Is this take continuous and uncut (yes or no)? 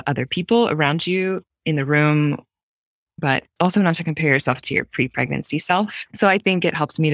no